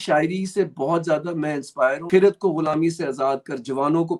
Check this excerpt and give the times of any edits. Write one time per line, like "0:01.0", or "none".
0:02.0